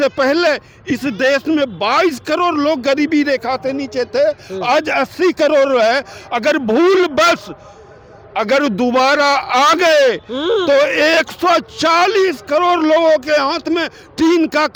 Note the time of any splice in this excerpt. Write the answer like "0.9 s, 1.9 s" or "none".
none

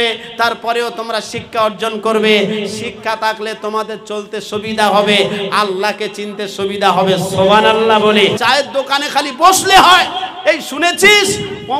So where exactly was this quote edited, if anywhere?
8.4 s

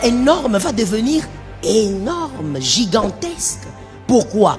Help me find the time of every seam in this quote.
none

